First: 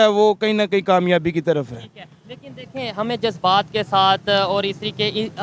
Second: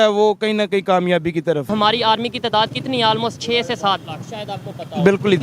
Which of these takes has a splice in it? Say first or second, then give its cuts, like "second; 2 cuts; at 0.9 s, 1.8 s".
second; 1 cut; at 1.7 s